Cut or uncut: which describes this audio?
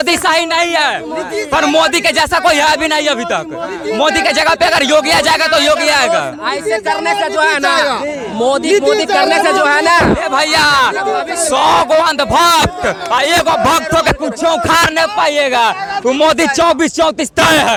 uncut